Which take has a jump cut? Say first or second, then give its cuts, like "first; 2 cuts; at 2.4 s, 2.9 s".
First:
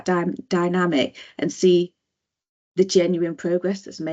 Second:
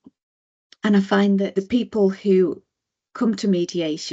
second; 1 cut; at 1.5 s